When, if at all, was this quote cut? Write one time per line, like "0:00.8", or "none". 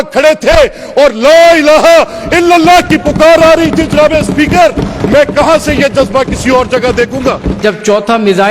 0:07.6